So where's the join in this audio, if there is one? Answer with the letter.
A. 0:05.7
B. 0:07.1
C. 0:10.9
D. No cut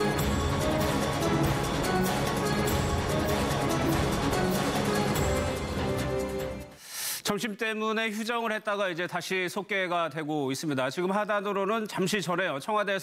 C